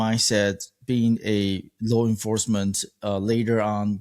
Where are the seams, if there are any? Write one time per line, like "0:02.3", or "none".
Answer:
none